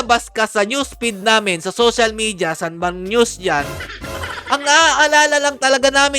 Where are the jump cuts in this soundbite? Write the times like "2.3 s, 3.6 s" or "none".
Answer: none